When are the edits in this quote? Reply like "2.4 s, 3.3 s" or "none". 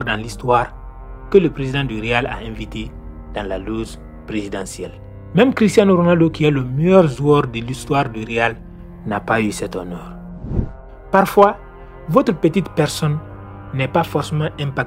10.5 s